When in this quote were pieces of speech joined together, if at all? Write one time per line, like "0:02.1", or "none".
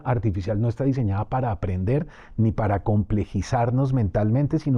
none